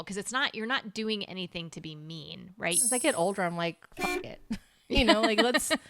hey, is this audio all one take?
no; 1 cut; at 2.8 s

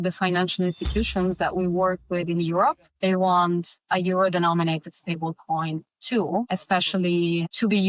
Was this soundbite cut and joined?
no; 0 cuts

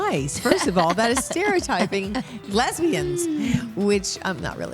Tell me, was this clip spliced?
yes; 1 cut; at 2.4 s

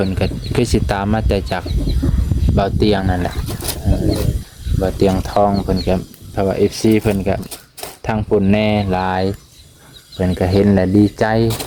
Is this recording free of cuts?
yes; 0 cuts

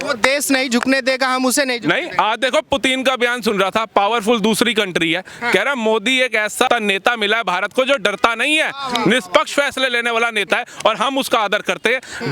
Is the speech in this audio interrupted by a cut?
yes; 1 cut; at 6.7 s

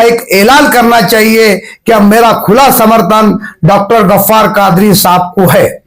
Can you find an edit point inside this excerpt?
no; 0 cuts

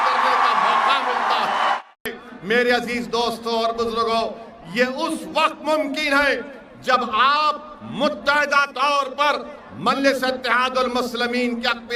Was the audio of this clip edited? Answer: no; 0 cuts

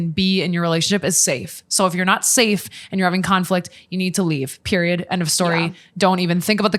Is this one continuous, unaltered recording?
yes; 0 cuts

